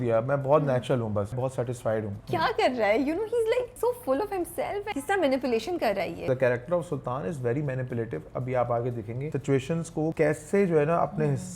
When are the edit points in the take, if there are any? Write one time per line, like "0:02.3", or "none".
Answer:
0:01.7
0:03.7
0:04.9
0:06.2
0:09.8